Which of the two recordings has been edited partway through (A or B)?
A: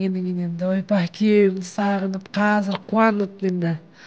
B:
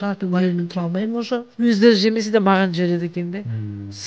B